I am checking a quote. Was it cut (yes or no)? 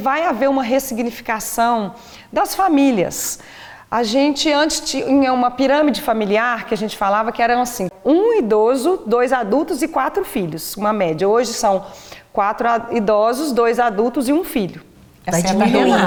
no